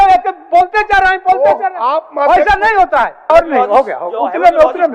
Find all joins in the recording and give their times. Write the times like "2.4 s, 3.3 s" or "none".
3.3 s